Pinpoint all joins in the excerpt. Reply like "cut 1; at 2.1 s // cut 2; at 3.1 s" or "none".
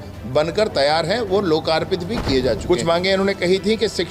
cut 1; at 2.6 s

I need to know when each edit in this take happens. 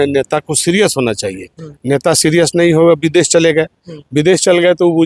none

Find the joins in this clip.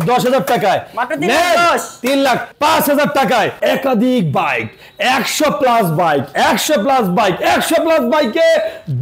cut 1; at 3.6 s

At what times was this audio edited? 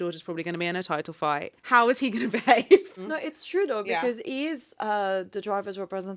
none

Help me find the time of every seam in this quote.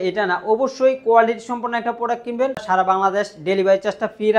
cut 1; at 2.6 s

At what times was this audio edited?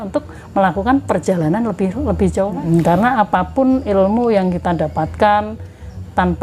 cut 1; at 2.5 s

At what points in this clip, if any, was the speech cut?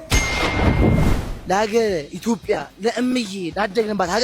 cut 1; at 1.3 s

